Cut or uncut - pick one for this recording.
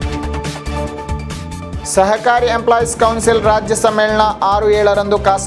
cut